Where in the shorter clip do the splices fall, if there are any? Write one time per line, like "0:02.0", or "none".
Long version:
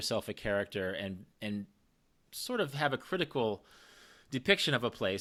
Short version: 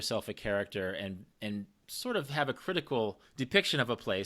0:01.8
0:03.2

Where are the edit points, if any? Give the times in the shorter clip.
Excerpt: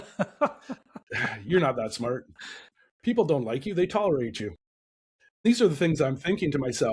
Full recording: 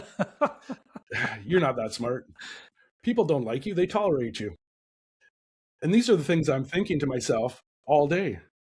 0:05.5

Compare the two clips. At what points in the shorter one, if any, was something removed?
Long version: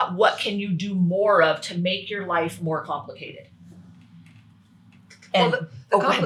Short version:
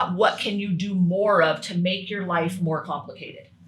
none

